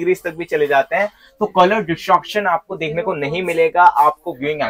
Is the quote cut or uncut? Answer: uncut